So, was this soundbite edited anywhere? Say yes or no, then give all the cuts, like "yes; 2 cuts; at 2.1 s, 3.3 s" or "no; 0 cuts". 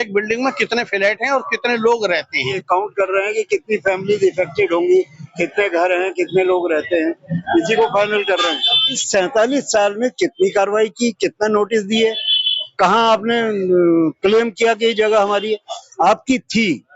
yes; 2 cuts; at 2.6 s, 9.0 s